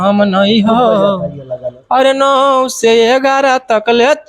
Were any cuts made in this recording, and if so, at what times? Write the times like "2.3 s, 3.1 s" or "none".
none